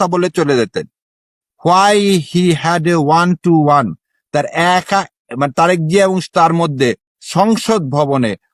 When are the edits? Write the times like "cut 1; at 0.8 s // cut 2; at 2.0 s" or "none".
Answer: none